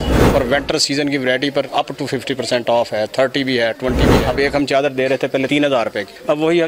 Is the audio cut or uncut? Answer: cut